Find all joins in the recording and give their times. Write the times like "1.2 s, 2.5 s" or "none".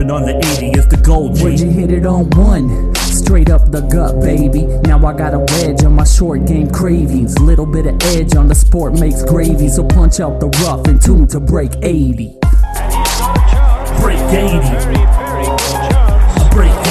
none